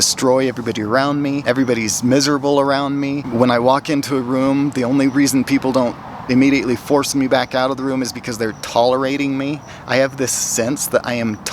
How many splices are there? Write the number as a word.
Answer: two